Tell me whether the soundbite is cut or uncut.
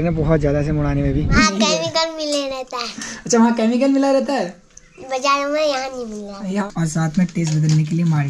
cut